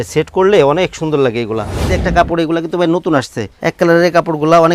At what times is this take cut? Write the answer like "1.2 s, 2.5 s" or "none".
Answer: 1.9 s, 3.4 s